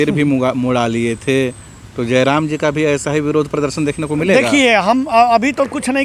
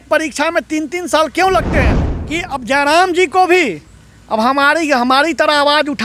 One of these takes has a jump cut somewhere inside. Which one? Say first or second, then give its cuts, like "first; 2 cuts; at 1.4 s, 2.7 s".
second; 1 cut; at 2.1 s